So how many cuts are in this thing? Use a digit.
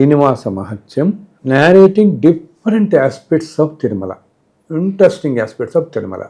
0